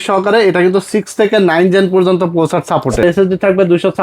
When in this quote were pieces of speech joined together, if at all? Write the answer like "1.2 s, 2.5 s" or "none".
3.0 s